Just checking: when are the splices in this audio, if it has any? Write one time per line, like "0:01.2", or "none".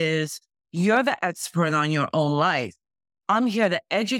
none